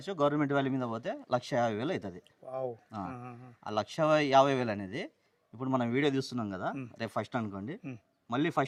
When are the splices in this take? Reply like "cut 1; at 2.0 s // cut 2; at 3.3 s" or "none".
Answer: none